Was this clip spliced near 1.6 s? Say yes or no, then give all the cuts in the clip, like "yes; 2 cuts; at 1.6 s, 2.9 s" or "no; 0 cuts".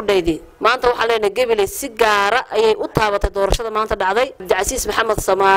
no; 1 cut; at 4.4 s